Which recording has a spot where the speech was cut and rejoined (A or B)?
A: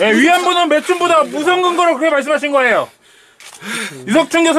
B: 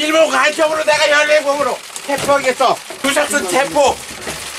B